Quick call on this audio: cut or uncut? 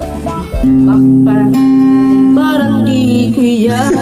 uncut